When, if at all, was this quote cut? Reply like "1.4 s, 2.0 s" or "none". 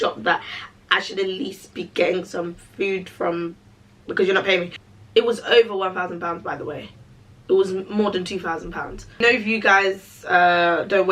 4.8 s, 9.2 s